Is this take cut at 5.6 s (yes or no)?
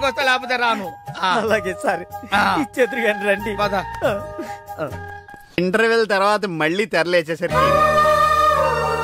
yes